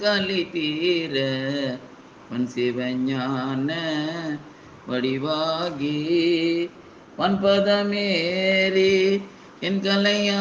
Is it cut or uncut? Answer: uncut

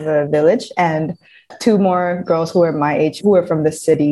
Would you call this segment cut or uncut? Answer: cut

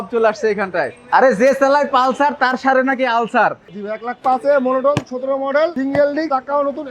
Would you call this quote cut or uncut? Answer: cut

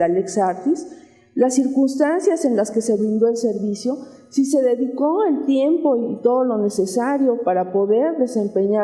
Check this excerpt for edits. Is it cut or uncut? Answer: uncut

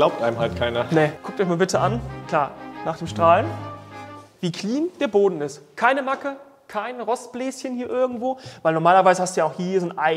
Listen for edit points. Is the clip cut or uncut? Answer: cut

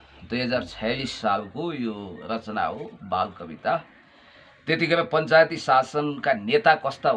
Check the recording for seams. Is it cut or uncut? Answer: uncut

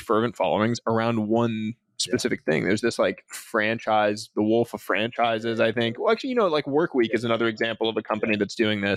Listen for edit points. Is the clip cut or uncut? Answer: uncut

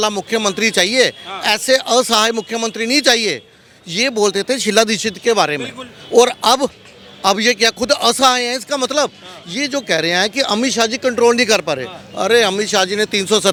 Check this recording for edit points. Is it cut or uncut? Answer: uncut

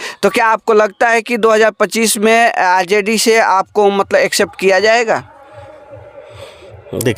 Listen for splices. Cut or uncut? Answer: uncut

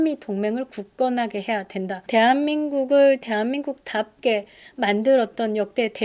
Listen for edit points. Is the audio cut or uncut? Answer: cut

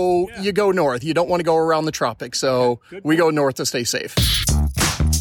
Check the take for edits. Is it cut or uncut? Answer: cut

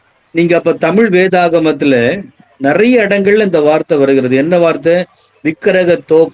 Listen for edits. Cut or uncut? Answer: uncut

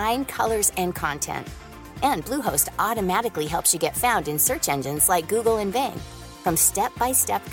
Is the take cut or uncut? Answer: uncut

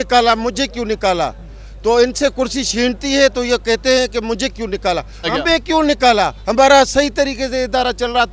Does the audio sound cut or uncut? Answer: cut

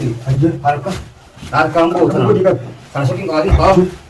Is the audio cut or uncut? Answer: uncut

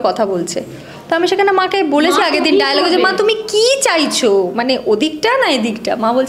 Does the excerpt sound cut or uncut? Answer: uncut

